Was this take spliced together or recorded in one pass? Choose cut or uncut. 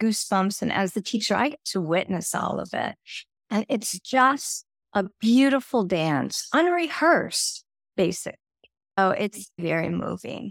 cut